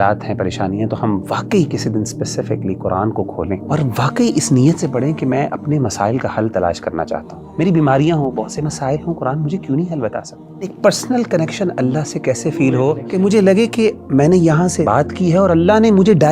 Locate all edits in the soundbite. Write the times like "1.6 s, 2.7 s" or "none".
3.6 s, 7.4 s, 10.7 s, 13.0 s, 14.8 s